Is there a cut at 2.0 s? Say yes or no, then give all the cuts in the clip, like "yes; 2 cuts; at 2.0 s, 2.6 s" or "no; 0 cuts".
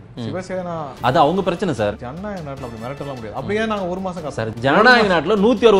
yes; 3 cuts; at 0.9 s, 2.0 s, 4.5 s